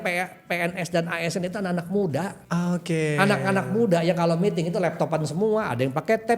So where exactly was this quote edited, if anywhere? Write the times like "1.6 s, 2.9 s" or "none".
2.4 s

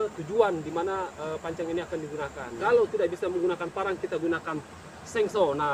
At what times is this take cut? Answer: 2.5 s

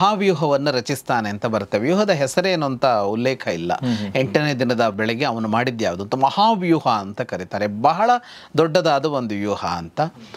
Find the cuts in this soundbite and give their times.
none

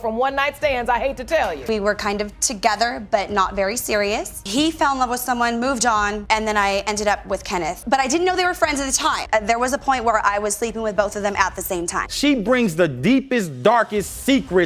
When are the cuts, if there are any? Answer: 1.7 s, 9.2 s, 12.0 s

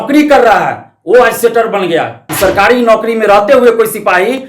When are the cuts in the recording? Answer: 2.2 s

